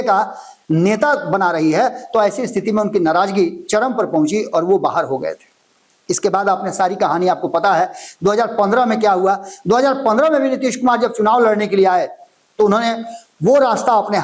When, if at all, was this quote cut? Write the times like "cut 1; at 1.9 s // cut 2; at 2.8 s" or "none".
none